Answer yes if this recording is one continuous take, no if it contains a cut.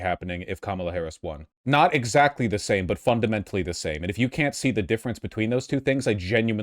no